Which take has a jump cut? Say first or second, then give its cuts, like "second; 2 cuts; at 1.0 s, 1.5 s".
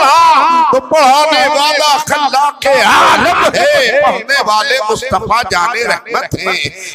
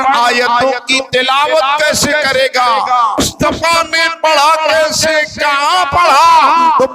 second; 1 cut; at 3.2 s